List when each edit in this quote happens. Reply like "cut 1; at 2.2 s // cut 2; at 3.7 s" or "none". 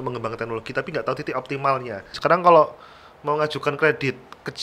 cut 1; at 2.1 s